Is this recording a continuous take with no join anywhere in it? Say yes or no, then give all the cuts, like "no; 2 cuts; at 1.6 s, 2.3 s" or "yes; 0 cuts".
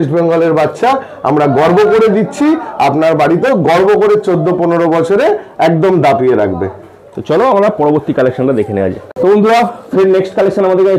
yes; 0 cuts